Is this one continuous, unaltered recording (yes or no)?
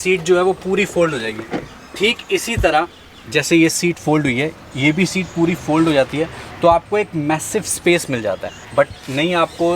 yes